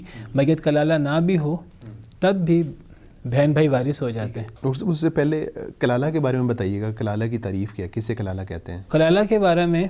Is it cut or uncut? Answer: uncut